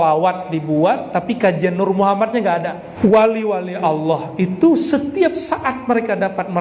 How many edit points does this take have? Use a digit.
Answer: 1